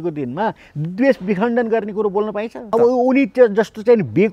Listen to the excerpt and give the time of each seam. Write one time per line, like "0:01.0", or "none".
0:02.7